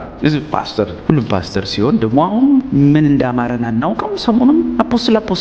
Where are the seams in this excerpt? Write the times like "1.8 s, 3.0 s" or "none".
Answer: 1.0 s, 2.7 s